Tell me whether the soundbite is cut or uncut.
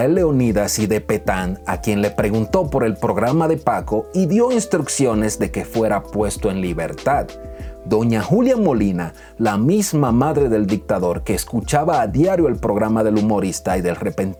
uncut